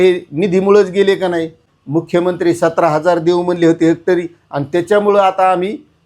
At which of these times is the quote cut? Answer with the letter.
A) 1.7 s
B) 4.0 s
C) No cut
A